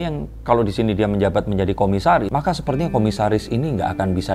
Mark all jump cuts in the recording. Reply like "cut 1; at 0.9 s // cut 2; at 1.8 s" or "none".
cut 1; at 2.3 s